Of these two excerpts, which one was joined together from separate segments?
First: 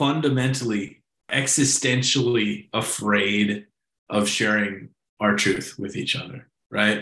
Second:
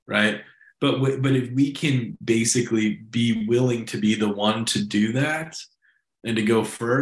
first; 1 cut; at 1.3 s

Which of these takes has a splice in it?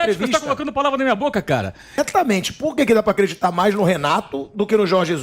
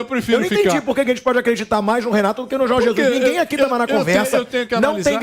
first; 1 cut; at 2.0 s

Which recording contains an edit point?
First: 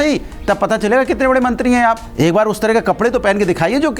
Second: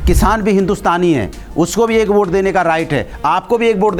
first; 1 cut; at 2.1 s

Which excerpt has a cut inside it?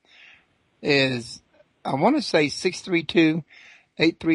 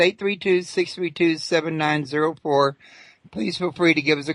first; 1 cut; at 2.2 s

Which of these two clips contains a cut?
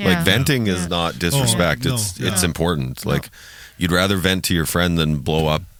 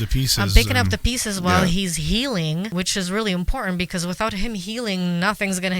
second; 1 cut; at 2.7 s

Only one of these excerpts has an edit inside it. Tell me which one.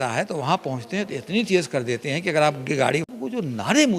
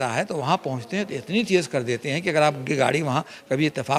first; 1 cut; at 3.1 s

